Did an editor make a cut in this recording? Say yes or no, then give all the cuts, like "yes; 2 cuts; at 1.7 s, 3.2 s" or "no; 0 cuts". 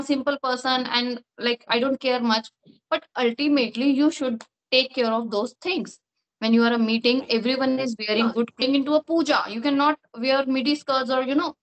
yes; 1 cut; at 8.6 s